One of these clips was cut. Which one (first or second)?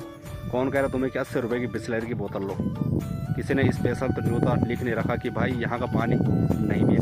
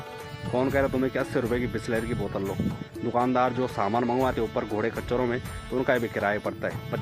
second